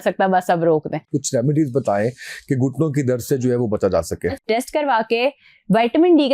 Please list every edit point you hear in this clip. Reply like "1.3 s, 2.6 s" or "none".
1.1 s, 4.2 s